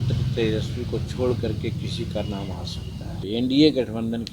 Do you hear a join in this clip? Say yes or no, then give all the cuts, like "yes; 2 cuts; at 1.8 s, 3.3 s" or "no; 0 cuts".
yes; 1 cut; at 3.2 s